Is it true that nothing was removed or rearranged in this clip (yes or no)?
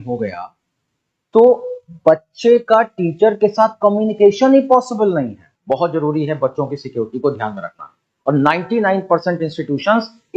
no